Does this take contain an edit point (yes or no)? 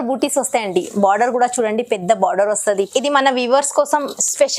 yes